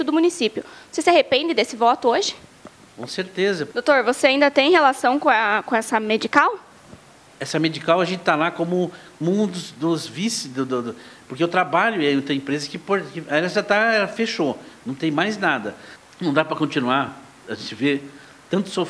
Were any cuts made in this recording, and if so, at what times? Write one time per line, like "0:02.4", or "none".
0:03.7
0:15.9